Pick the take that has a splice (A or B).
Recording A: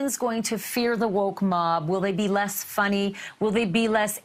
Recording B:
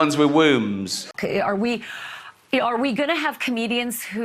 B